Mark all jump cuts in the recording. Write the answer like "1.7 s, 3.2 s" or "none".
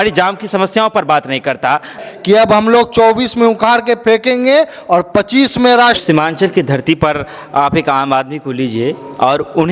2.0 s, 6.0 s